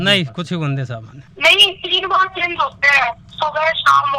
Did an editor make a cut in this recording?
yes; 1 cut; at 1.2 s

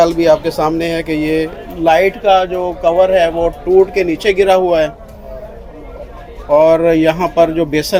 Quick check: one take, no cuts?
yes; 0 cuts

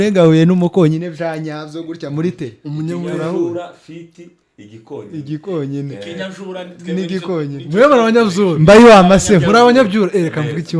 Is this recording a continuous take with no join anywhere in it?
yes; 0 cuts

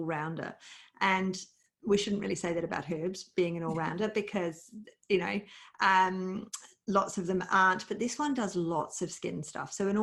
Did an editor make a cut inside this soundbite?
no; 0 cuts

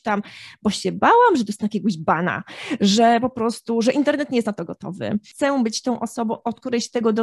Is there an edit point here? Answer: yes; 1 cut; at 5.3 s

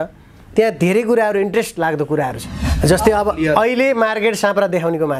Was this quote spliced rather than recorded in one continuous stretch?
yes; 1 cut; at 2.6 s

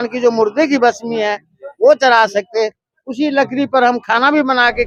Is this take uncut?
yes; 0 cuts

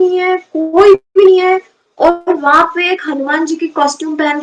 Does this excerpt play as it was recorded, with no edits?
yes; 0 cuts

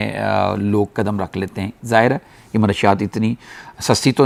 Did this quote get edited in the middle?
no; 0 cuts

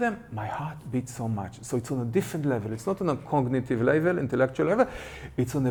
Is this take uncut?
yes; 0 cuts

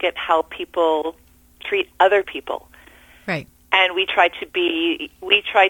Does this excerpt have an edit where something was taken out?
no; 0 cuts

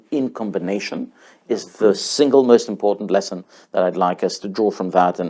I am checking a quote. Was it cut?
no; 0 cuts

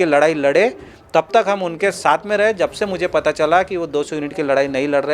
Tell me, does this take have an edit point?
no; 0 cuts

